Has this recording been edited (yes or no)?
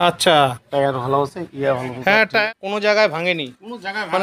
yes